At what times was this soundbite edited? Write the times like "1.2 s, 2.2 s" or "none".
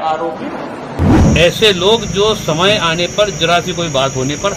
1.2 s